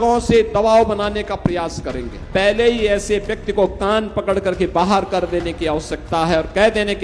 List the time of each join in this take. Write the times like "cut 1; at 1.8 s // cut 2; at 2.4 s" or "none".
cut 1; at 2.1 s